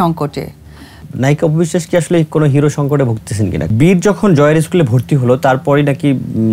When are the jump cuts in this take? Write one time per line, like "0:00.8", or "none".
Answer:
0:01.1
0:03.7